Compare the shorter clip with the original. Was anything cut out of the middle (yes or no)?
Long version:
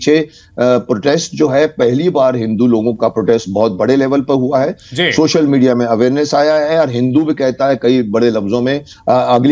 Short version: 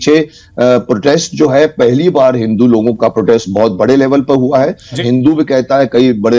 yes